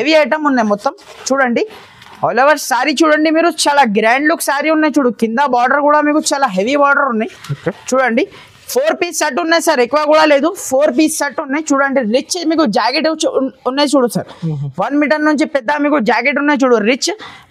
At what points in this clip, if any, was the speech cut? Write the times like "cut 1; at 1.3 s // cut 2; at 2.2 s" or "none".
none